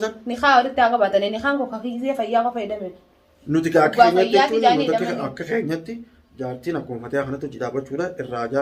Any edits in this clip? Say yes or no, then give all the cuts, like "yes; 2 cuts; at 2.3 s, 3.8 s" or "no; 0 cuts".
no; 0 cuts